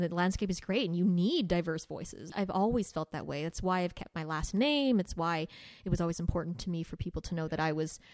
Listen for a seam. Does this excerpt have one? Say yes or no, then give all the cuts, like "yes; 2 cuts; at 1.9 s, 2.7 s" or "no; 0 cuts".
yes; 1 cut; at 2.3 s